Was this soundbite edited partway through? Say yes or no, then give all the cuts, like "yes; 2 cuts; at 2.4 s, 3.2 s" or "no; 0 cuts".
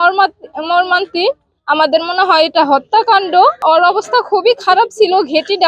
yes; 1 cut; at 3.6 s